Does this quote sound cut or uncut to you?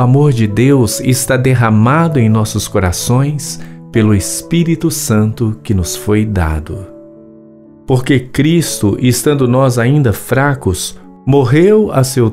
uncut